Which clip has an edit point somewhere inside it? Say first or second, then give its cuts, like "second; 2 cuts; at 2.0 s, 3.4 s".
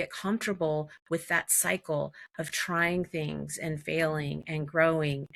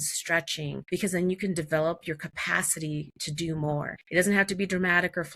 second; 2 cuts; at 0.8 s, 4.0 s